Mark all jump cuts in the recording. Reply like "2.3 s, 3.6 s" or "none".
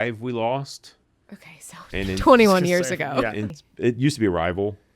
3.6 s